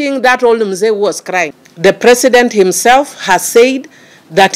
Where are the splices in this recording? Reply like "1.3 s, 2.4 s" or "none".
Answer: 1.6 s